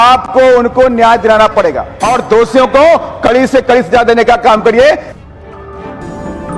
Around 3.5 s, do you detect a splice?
no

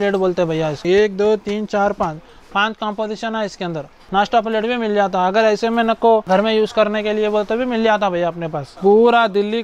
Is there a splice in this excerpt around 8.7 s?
yes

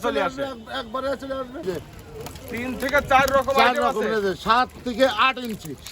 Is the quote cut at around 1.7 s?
yes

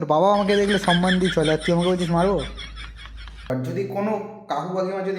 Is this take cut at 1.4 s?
no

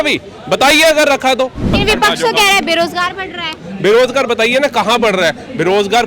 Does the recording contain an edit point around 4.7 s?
no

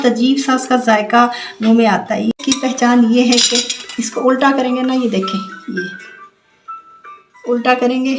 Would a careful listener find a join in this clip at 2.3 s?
yes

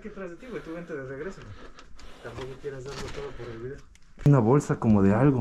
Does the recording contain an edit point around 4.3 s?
yes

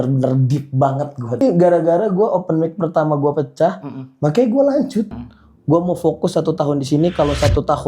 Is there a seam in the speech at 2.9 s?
no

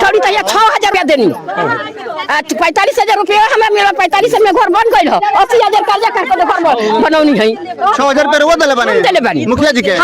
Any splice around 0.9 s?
yes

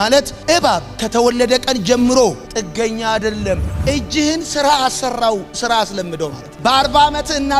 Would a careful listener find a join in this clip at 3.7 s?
yes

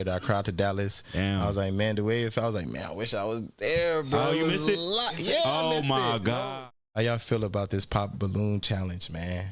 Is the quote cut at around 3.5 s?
no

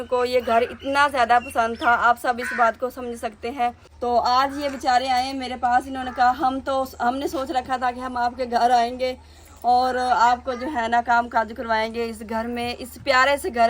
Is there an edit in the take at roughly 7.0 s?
no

